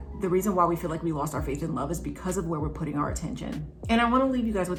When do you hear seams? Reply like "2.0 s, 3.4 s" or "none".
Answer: none